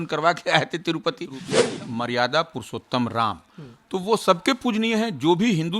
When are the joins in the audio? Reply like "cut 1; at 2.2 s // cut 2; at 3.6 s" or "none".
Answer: cut 1; at 1.5 s